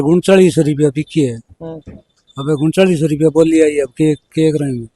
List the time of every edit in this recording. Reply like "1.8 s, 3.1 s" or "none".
none